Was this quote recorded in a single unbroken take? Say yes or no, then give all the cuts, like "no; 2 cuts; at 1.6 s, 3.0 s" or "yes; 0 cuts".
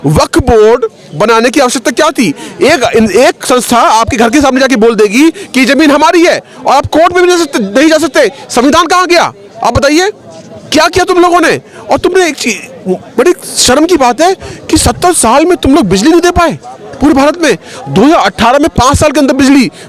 yes; 0 cuts